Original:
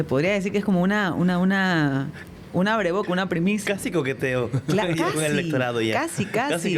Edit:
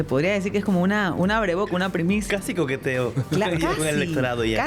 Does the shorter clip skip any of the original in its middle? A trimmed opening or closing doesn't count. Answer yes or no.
yes